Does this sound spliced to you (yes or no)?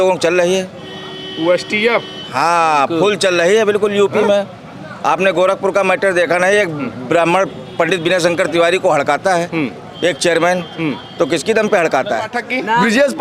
yes